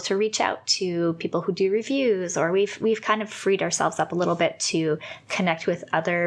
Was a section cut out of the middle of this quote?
no; 0 cuts

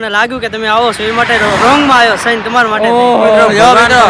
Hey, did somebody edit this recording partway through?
no; 0 cuts

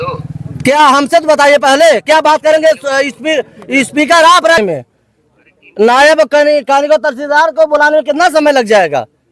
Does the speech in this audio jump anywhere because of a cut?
yes; 1 cut; at 4.6 s

